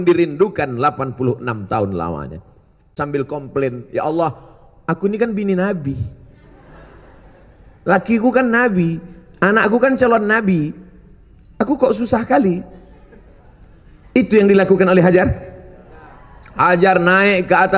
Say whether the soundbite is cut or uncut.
cut